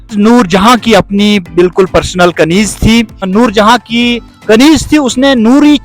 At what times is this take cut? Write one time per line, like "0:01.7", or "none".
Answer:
0:03.3